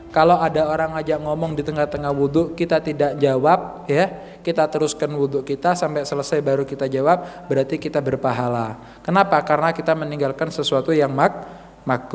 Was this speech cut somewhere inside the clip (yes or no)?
no